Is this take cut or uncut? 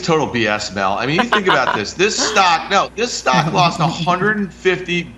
uncut